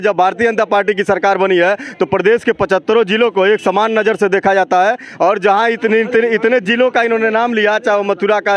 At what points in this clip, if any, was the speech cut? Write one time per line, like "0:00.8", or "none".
none